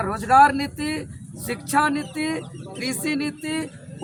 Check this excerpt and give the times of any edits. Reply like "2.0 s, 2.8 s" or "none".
none